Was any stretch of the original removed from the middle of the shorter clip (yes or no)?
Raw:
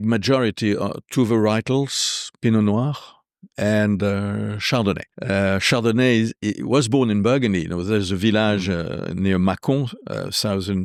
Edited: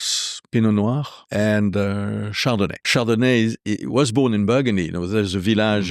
yes